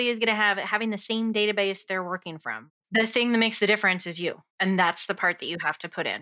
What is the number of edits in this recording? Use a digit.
1